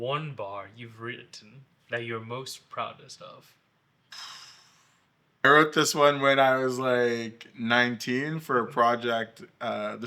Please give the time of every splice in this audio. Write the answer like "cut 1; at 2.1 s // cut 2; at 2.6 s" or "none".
cut 1; at 5.5 s